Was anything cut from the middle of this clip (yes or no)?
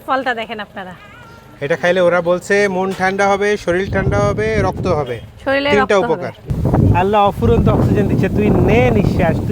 yes